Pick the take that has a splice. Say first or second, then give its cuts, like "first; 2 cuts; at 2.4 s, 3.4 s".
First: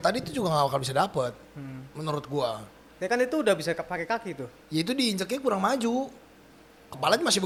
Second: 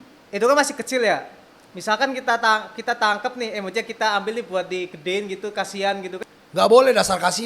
second; 1 cut; at 6.2 s